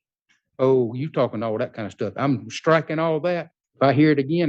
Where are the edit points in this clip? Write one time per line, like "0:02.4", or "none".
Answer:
0:03.6